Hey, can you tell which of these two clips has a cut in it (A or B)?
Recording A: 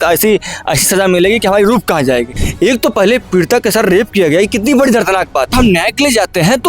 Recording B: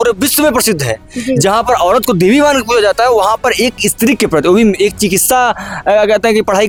A